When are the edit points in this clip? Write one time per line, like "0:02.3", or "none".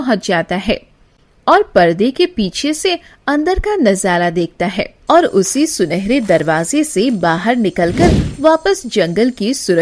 0:04.9